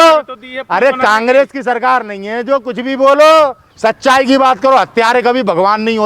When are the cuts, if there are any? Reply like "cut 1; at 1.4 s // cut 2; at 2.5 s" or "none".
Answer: cut 1; at 3.7 s